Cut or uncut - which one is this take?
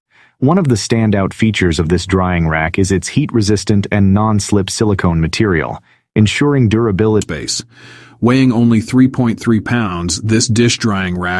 cut